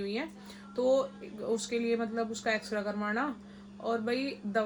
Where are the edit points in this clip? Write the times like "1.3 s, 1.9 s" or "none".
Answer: none